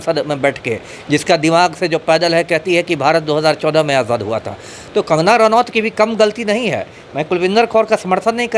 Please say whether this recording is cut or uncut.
uncut